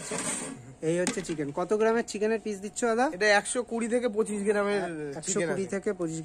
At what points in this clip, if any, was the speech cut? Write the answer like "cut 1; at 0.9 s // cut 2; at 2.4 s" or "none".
none

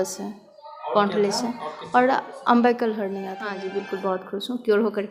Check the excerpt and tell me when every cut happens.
cut 1; at 3.4 s

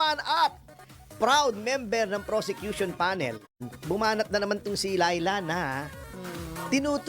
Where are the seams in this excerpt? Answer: cut 1; at 3.6 s

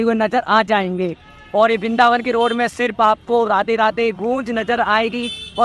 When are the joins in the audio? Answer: none

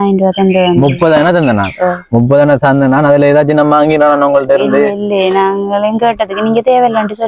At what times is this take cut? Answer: none

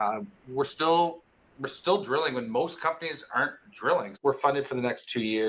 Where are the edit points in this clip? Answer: cut 1; at 4.1 s

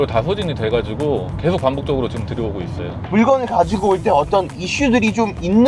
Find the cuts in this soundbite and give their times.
cut 1; at 2.9 s

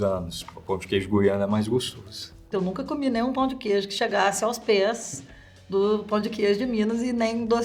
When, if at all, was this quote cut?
none

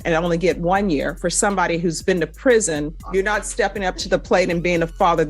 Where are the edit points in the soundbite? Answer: cut 1; at 3.0 s

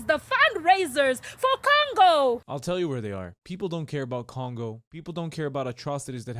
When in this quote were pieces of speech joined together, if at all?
cut 1; at 2.5 s // cut 2; at 3.4 s // cut 3; at 5.1 s

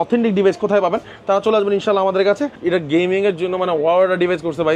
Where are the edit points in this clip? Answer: cut 1; at 2.5 s

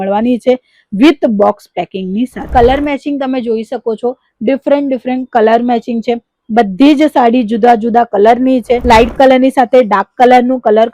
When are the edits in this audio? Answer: cut 1; at 2.4 s // cut 2; at 8.8 s

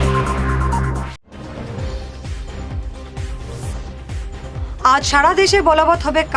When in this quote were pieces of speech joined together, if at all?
cut 1; at 1.1 s

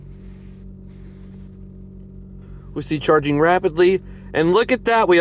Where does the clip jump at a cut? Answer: none

